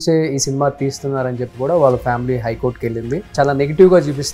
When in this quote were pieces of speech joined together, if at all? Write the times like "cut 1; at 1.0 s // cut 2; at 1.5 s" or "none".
cut 1; at 3.3 s